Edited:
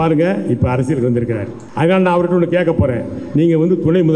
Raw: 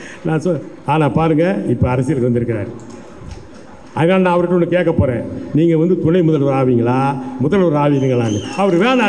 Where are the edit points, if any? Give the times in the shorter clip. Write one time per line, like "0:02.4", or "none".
0:01.6